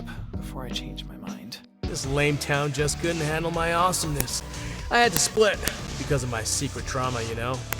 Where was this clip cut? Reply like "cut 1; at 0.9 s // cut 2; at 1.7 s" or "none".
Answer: cut 1; at 1.8 s